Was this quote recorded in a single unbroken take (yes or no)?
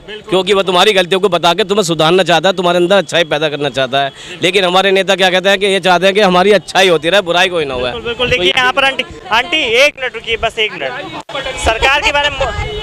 yes